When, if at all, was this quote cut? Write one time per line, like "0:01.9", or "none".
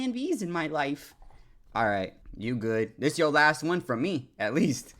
0:02.2